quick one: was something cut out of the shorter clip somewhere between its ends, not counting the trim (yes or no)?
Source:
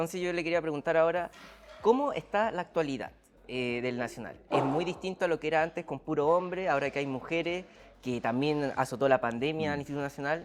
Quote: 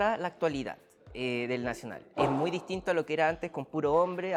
no